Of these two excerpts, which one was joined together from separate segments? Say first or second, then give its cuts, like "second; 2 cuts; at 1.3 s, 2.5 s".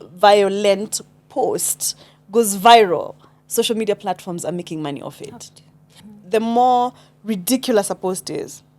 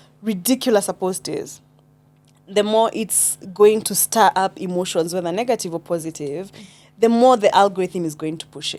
first; 1 cut; at 5.9 s